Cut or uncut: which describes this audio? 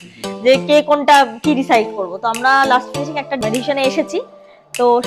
cut